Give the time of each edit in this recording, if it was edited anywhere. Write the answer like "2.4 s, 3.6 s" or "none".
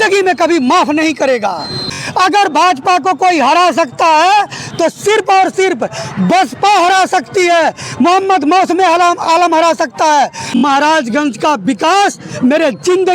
1.9 s, 10.6 s